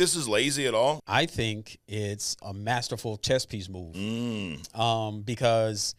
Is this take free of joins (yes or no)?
no